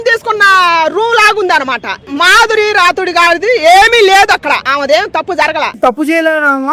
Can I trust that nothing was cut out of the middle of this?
no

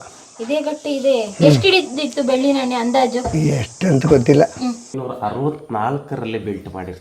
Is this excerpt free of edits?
no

